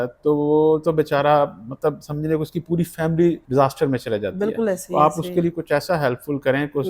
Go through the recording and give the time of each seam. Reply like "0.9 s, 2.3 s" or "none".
3.4 s